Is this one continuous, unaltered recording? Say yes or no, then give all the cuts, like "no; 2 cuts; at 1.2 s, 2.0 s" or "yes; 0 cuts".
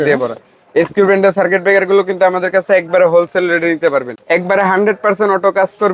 no; 1 cut; at 4.1 s